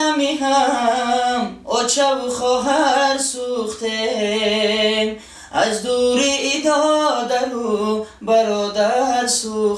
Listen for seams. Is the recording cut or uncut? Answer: uncut